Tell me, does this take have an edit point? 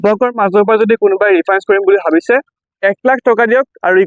no; 0 cuts

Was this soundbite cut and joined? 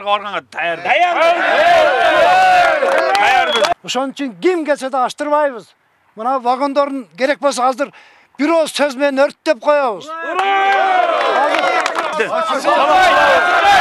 no; 0 cuts

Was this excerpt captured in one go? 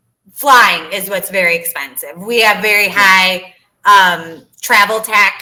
yes; 0 cuts

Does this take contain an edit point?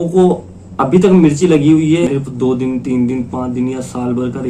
yes; 1 cut; at 2.1 s

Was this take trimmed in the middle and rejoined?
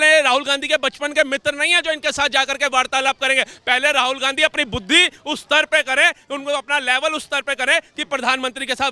no; 0 cuts

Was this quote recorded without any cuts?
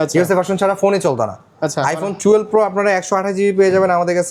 yes; 0 cuts

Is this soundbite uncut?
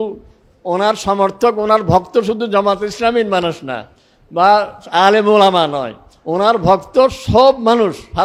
yes; 0 cuts

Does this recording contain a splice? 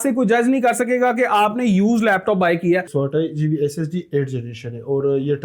yes; 1 cut; at 2.9 s

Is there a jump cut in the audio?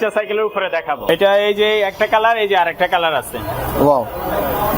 yes; 1 cut; at 1.1 s

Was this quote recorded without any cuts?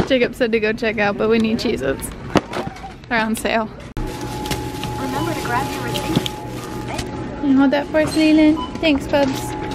yes; 0 cuts

